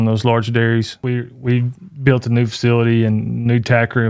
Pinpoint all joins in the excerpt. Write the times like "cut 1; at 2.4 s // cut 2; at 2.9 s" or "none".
cut 1; at 1.0 s